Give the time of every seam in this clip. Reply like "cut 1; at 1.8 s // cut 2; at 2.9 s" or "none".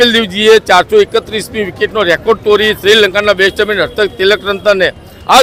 none